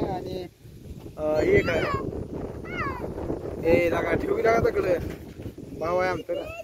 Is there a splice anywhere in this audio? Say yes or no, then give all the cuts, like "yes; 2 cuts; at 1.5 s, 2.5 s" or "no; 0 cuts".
yes; 1 cut; at 5.6 s